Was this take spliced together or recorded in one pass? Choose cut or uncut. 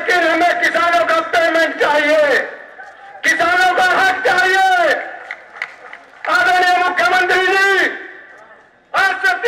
uncut